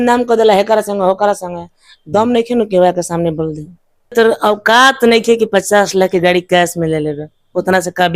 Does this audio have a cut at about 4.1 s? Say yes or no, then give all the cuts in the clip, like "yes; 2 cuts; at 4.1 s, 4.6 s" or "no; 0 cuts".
yes; 1 cut; at 4.1 s